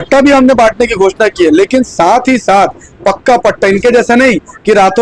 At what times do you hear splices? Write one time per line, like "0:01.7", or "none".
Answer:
none